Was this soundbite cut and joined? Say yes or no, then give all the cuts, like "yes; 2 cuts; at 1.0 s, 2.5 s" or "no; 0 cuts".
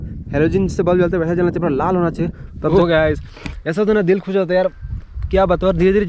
yes; 1 cut; at 2.4 s